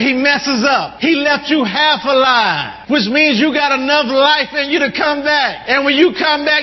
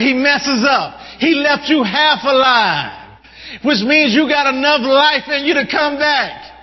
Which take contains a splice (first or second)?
first